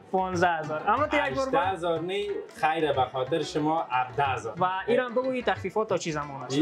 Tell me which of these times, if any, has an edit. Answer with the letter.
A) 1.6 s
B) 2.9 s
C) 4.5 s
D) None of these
C